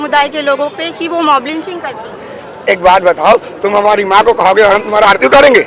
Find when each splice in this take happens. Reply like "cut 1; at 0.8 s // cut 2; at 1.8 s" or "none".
none